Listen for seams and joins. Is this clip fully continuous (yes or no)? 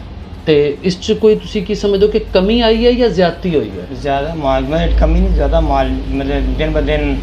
yes